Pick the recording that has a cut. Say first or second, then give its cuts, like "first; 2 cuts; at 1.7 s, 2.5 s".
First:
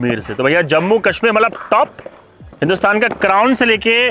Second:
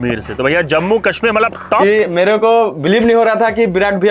second; 1 cut; at 1.8 s